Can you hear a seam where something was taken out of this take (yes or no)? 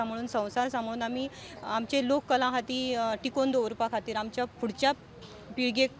no